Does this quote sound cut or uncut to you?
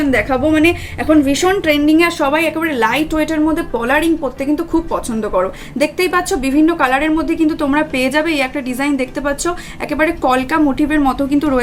uncut